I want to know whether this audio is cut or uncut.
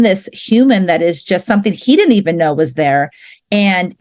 uncut